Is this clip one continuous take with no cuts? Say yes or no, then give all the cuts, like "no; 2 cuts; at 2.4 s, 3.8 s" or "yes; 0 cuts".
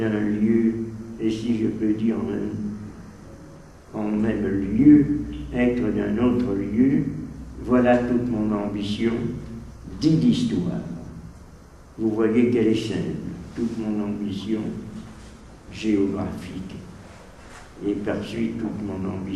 yes; 0 cuts